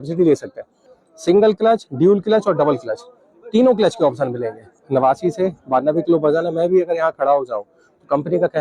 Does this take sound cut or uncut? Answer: cut